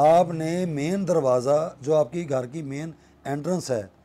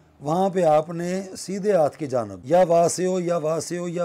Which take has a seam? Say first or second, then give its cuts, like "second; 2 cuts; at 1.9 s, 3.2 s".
second; 1 cut; at 2.4 s